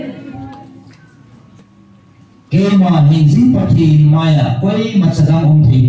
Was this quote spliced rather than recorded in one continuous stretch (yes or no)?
yes